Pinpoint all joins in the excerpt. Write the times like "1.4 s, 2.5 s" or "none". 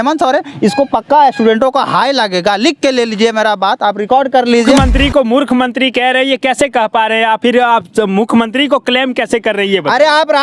4.7 s